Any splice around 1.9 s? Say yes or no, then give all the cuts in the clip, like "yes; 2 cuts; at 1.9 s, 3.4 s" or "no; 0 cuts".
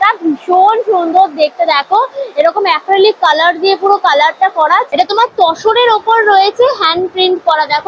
no; 1 cut; at 4.9 s